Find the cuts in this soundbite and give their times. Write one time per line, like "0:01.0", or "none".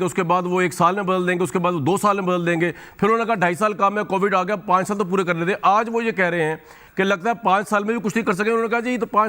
0:06.8